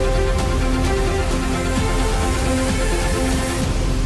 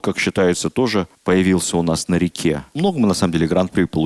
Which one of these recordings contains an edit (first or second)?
second